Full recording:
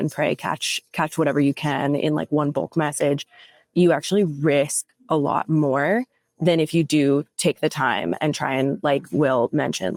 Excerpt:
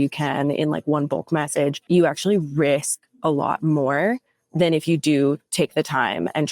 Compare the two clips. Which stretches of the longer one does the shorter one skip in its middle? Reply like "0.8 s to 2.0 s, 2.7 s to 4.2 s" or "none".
3.2 s to 3.7 s